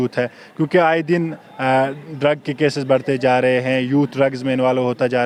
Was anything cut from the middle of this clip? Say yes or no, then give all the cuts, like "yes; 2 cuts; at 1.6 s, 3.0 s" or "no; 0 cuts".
no; 0 cuts